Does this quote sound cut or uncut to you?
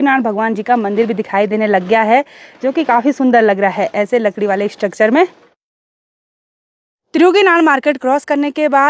uncut